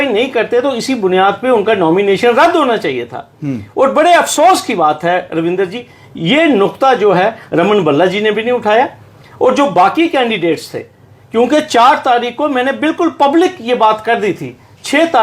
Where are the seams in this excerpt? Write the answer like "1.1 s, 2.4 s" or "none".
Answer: none